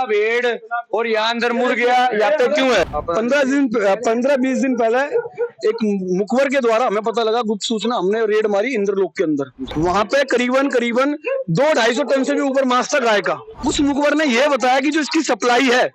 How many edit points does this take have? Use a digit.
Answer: 3